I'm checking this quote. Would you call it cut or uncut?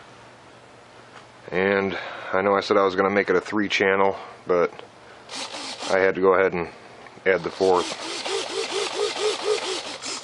cut